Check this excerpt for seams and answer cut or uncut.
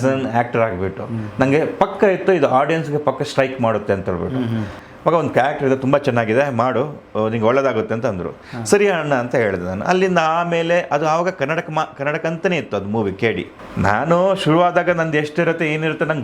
cut